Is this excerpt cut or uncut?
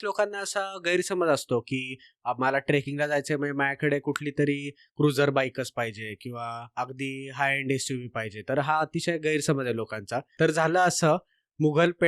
cut